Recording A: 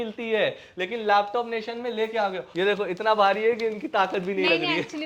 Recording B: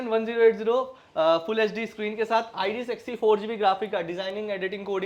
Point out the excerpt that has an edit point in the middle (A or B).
A